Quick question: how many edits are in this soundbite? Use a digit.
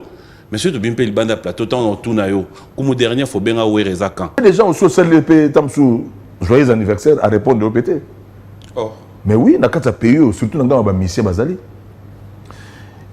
1